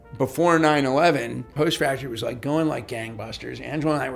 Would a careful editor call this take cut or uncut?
cut